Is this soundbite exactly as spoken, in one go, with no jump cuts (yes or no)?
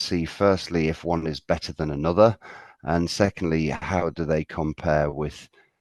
yes